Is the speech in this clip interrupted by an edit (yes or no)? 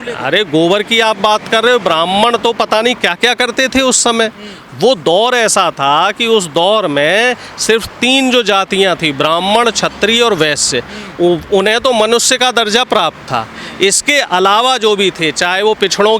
no